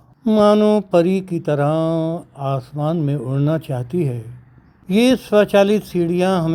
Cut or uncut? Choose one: uncut